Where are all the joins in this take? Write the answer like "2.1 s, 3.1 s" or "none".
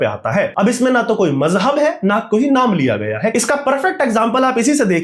3.3 s